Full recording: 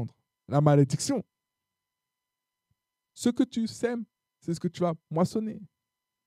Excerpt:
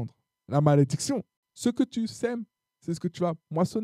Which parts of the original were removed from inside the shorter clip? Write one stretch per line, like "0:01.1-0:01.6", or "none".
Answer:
0:01.4-0:03.0